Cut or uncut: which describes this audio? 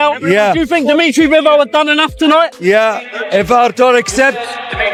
uncut